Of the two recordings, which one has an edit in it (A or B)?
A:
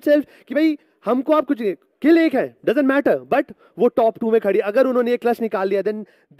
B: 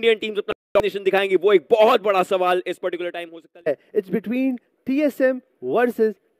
B